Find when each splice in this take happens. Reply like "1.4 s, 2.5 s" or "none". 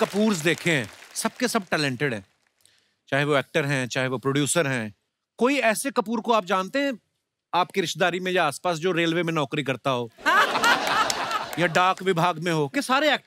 none